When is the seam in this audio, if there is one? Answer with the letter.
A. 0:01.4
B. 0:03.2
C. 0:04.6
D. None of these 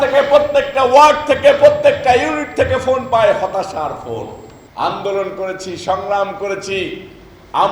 D